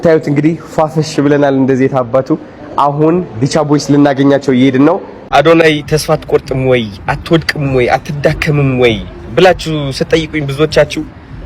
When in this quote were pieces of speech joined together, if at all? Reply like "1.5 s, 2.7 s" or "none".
5.1 s